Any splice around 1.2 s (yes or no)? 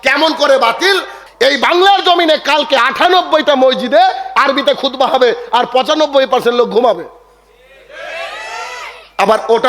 yes